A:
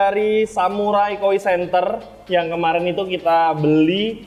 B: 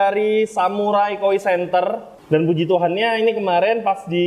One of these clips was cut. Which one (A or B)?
B